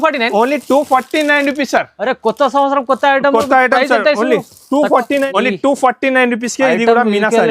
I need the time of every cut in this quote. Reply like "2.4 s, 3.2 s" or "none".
5.3 s